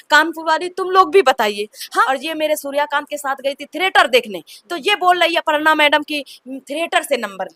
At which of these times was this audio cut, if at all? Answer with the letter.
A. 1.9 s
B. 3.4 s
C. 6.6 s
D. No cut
A